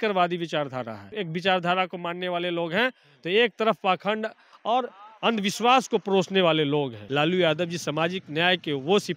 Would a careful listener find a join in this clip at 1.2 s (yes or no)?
yes